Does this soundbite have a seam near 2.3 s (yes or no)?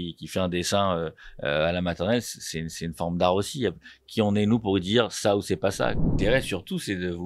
no